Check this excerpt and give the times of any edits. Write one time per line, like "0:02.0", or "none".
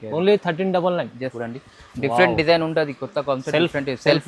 0:01.4